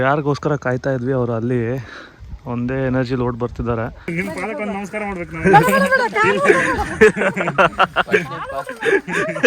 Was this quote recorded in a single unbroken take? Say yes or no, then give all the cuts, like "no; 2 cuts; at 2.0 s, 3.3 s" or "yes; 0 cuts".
no; 1 cut; at 4.1 s